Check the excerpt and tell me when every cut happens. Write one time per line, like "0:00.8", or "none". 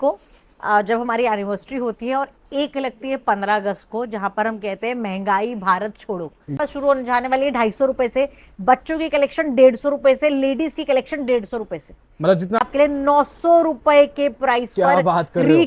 0:06.6
0:12.6